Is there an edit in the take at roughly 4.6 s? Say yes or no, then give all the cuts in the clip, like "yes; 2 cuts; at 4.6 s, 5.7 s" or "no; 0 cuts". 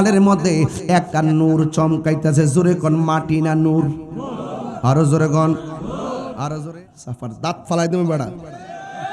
no; 1 cut; at 6.7 s